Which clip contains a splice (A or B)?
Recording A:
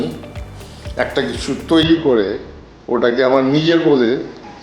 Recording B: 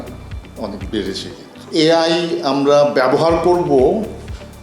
B